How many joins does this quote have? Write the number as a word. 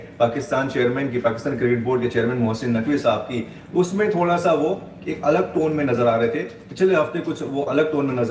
zero